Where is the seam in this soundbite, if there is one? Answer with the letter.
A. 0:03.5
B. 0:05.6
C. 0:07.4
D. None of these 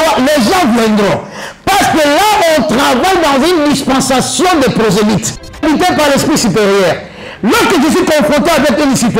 B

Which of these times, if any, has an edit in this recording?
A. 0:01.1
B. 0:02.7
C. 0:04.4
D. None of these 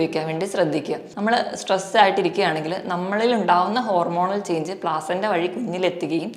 A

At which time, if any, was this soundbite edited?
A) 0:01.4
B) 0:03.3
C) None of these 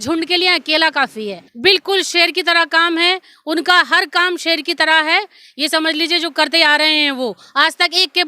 A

